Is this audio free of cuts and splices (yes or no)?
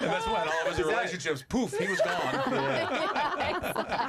yes